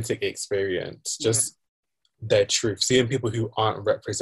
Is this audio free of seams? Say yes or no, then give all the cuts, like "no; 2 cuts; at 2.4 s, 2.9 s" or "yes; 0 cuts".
yes; 0 cuts